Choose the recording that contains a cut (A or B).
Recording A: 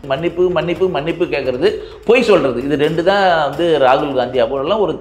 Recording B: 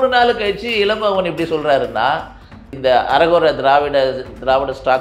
B